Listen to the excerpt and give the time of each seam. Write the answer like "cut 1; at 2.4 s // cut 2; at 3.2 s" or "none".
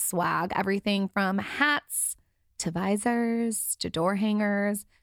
none